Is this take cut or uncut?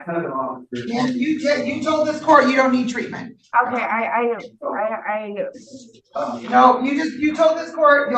uncut